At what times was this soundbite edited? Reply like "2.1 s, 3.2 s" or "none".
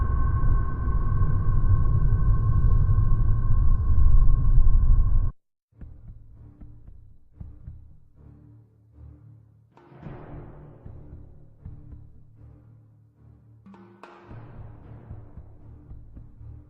4.8 s